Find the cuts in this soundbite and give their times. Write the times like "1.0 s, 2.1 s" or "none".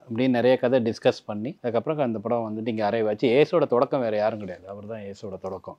1.5 s